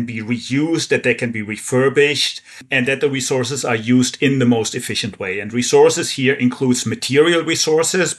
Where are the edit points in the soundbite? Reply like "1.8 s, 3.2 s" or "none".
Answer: 2.6 s